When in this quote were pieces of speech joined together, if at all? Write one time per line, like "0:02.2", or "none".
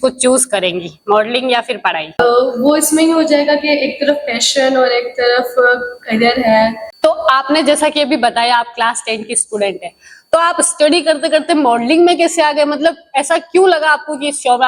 0:02.2
0:06.8